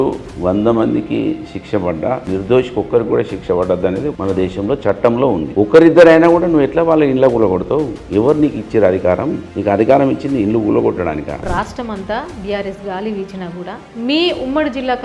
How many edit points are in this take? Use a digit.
4